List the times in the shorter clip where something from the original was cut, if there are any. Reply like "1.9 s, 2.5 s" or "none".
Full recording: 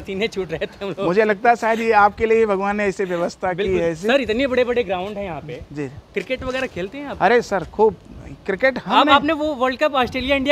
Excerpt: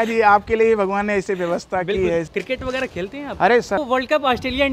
2.3 s, 3.8 s